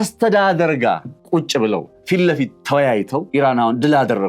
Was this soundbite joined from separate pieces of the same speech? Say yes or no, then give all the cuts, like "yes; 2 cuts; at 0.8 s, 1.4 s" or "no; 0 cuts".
yes; 3 cuts; at 1.1 s, 1.9 s, 3.3 s